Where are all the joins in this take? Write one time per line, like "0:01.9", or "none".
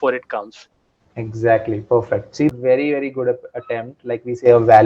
0:02.6

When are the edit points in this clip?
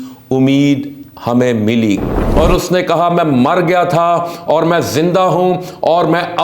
0:02.2

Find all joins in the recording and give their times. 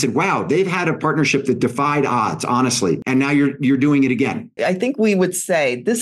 0:03.0
0:04.5

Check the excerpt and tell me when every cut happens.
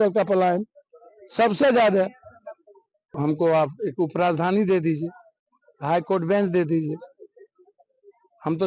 0:03.0

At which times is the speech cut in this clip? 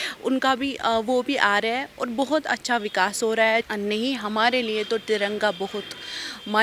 0:03.6

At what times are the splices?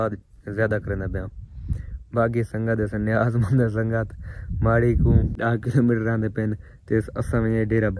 0:05.3

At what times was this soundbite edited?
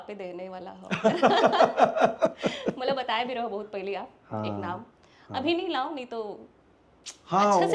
none

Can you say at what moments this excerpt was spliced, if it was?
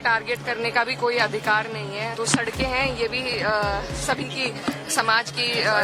0:02.1

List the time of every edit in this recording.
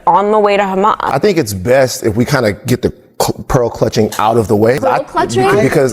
0:01.1
0:04.8

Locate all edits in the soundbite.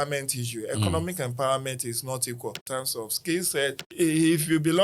0:02.6
0:03.8

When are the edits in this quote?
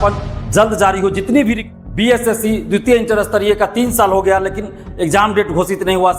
0:01.7

